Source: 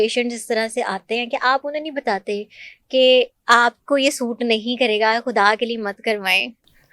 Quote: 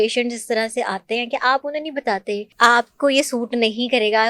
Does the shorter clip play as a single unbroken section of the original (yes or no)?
no